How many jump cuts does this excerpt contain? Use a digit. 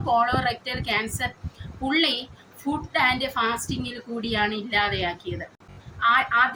0